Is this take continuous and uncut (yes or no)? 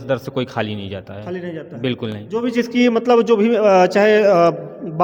yes